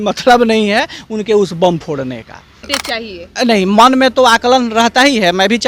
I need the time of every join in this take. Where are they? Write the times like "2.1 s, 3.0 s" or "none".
2.7 s

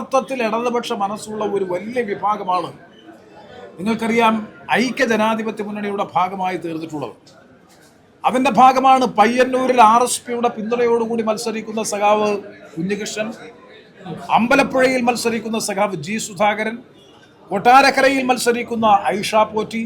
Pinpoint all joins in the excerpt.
none

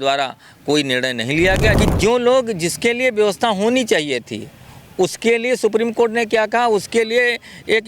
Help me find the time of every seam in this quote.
1.8 s

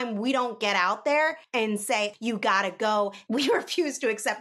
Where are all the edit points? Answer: 2.1 s, 3.2 s

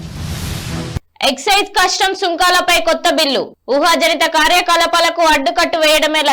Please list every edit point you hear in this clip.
none

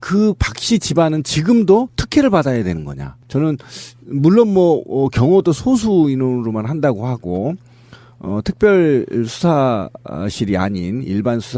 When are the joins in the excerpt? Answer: 2.6 s

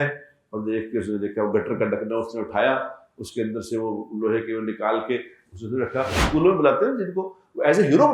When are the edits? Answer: 6.2 s

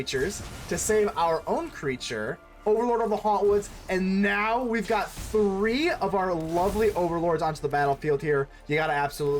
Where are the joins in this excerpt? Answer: 2.4 s

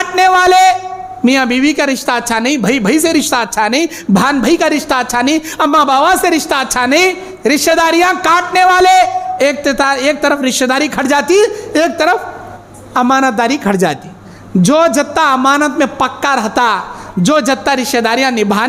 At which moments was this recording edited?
none

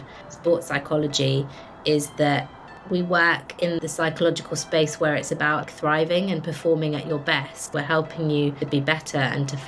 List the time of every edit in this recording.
3.8 s, 5.7 s, 7.6 s, 8.6 s

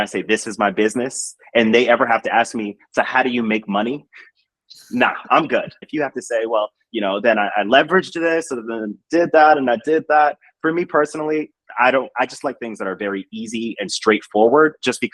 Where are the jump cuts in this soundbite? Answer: 5.8 s

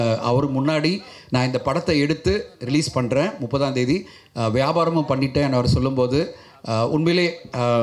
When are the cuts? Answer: none

